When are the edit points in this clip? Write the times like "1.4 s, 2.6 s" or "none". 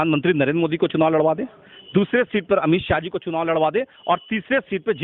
none

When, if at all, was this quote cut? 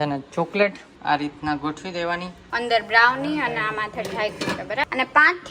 0.9 s, 2.4 s, 4.8 s

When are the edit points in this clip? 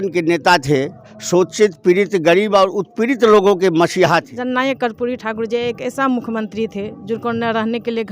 4.4 s

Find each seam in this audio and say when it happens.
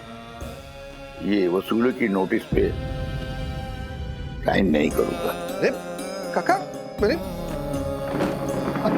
2.7 s, 4.4 s, 5.2 s

